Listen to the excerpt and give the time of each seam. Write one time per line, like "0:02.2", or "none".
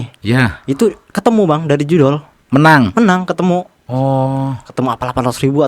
none